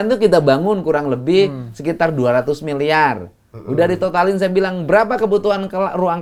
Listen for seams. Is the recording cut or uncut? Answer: uncut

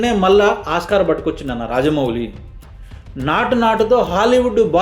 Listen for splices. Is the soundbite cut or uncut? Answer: uncut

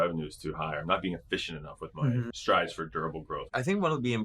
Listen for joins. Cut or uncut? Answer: cut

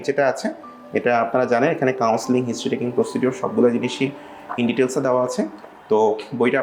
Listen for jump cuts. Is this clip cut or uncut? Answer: uncut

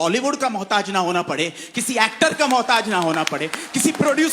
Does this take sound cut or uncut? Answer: uncut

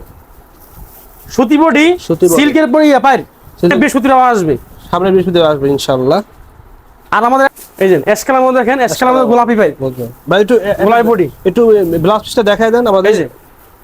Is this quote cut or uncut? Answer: cut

